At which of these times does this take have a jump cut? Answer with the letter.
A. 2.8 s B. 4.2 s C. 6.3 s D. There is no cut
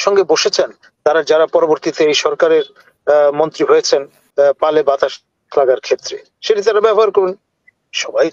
B